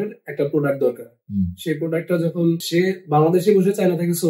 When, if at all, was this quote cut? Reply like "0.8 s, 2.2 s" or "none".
2.6 s